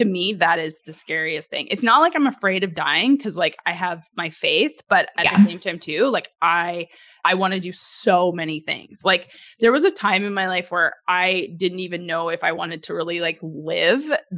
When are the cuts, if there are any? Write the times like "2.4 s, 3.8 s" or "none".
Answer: 7.1 s